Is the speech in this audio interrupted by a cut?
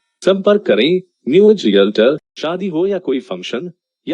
yes; 1 cut; at 2.3 s

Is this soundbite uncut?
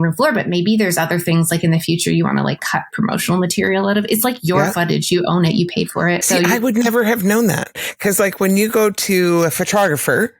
no; 1 cut; at 6.2 s

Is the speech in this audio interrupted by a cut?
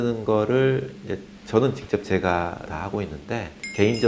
no; 0 cuts

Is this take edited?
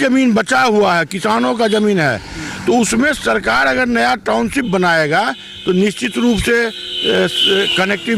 no; 0 cuts

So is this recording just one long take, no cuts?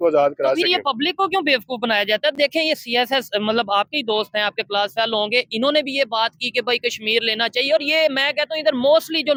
yes; 0 cuts

